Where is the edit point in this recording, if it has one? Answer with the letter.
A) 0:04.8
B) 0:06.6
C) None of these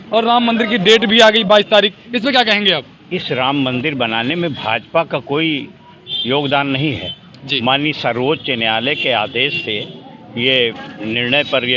C